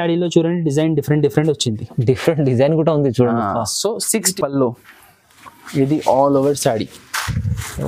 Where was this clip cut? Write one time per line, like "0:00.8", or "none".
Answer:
0:04.3